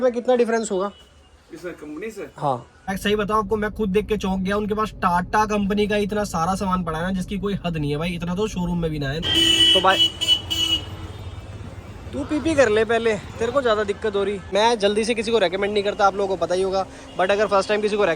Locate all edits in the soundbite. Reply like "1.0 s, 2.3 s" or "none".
2.9 s, 9.2 s, 14.5 s